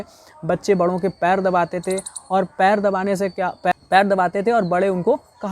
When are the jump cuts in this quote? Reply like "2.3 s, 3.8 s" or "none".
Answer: 3.7 s